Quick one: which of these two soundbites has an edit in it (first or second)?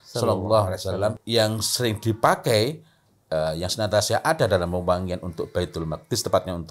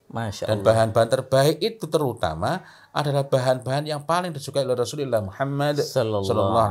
first